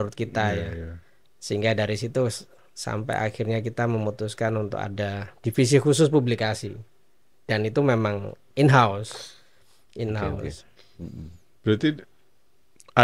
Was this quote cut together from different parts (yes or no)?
no